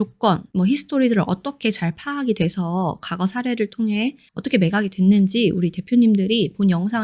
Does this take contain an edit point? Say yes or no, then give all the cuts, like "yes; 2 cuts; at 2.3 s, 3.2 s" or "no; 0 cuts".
no; 0 cuts